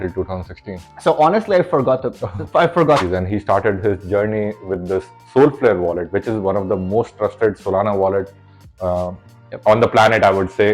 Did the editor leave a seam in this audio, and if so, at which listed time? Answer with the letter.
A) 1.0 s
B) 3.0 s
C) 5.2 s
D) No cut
B